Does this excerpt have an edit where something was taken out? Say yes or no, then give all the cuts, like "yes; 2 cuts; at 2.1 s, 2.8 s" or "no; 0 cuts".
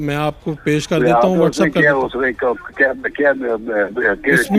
no; 0 cuts